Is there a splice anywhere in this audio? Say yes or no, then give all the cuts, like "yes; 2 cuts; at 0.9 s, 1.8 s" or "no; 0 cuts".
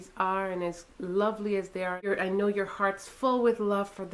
no; 0 cuts